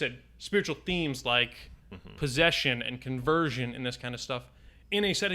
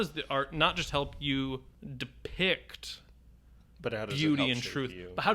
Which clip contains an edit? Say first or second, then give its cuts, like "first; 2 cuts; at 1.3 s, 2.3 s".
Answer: second; 1 cut; at 1.8 s